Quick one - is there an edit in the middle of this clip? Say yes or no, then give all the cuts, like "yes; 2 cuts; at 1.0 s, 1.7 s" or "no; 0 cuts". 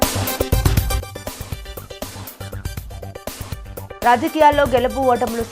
yes; 2 cuts; at 1.1 s, 2.7 s